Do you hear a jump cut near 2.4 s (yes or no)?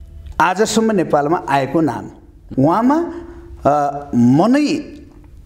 yes